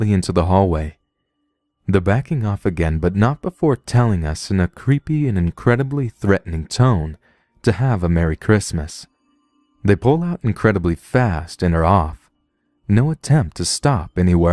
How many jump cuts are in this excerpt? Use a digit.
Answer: 1